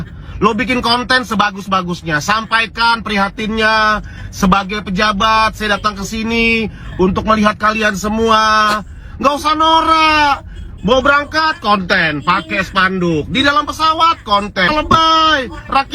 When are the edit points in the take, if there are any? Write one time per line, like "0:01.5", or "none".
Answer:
none

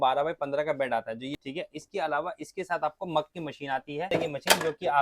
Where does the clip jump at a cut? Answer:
0:01.3
0:04.1

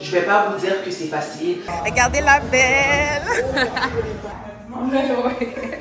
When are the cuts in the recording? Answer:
0:01.7
0:04.3

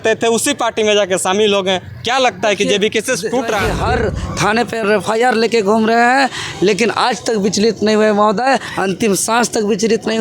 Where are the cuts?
0:03.7

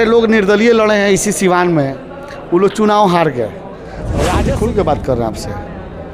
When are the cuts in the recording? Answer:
0:04.3

